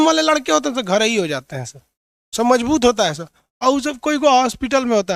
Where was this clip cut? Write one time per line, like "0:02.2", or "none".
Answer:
none